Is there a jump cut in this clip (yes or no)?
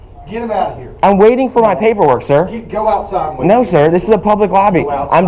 no